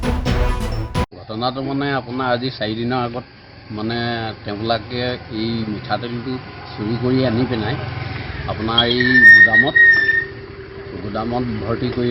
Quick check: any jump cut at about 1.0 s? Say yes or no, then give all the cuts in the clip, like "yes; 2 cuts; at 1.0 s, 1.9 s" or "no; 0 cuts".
yes; 1 cut; at 1.0 s